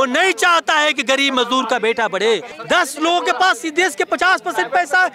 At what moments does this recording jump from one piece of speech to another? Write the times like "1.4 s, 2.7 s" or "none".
2.5 s